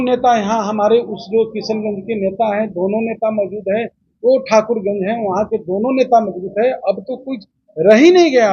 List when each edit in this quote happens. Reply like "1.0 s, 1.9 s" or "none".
none